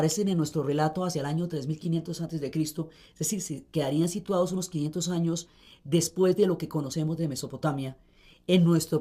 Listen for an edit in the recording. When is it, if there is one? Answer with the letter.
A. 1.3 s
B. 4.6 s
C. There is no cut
A